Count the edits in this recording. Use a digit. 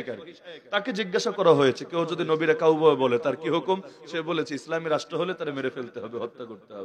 0